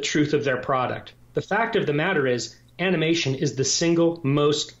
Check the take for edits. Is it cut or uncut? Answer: cut